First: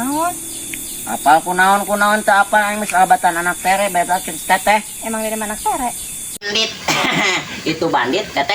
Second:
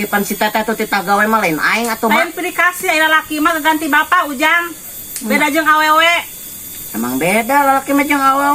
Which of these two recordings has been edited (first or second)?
first